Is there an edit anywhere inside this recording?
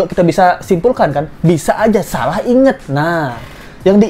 no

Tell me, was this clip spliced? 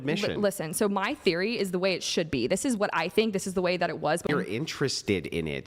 yes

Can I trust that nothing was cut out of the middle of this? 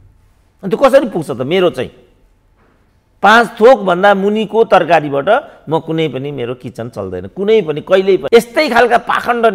no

